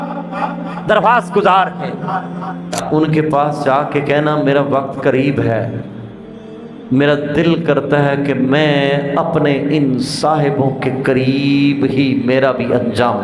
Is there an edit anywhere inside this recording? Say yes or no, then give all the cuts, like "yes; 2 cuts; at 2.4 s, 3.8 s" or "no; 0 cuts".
yes; 1 cut; at 2.7 s